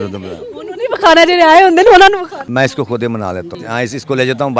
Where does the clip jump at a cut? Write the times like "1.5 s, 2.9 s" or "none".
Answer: 2.4 s, 3.5 s

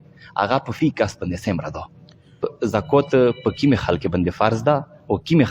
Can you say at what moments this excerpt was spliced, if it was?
2.5 s

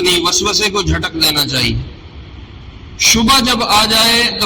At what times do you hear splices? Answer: none

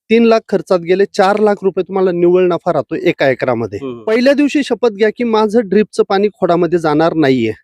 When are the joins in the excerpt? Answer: 3.9 s

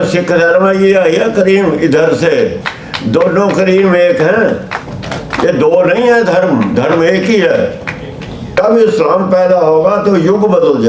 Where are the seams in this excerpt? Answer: 8.6 s

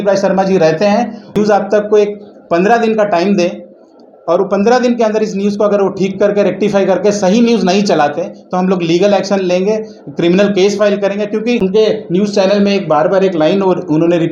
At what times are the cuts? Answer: 1.4 s, 11.6 s

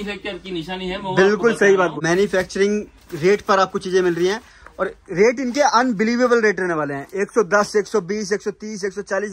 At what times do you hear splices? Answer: 2.0 s

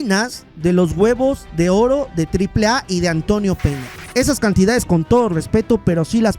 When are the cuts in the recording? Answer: 4.0 s

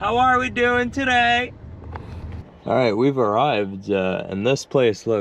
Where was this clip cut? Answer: 2.4 s

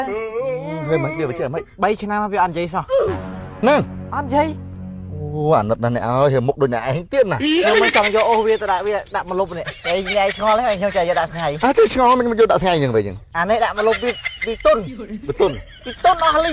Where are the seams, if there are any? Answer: none

